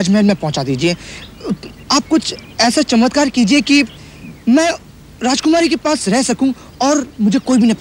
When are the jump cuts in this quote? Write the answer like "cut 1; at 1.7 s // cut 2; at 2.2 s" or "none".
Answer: none